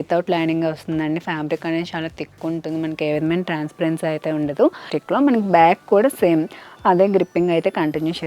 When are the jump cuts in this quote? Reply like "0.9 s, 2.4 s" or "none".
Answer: 4.9 s